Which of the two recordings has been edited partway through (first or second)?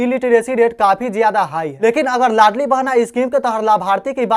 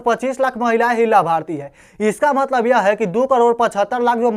first